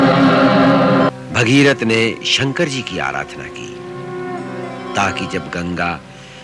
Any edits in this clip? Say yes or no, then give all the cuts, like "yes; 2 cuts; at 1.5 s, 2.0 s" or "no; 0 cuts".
yes; 1 cut; at 1.1 s